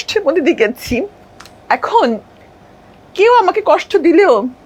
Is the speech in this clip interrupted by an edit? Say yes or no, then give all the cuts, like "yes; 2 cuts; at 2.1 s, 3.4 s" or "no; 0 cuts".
no; 0 cuts